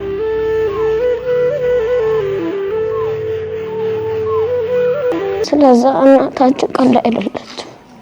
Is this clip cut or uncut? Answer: cut